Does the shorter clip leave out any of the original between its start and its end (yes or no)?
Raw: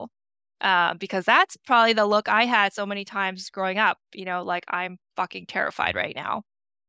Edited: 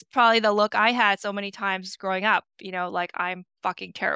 no